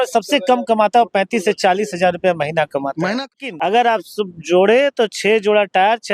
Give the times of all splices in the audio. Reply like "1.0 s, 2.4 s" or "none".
3.4 s